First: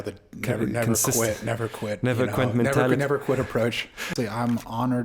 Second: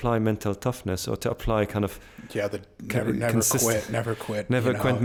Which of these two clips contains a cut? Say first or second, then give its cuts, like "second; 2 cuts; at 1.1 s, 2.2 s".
first; 1 cut; at 4.1 s